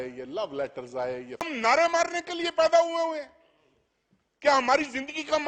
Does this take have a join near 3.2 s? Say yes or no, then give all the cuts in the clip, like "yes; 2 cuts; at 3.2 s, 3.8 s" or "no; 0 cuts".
no; 1 cut; at 1.5 s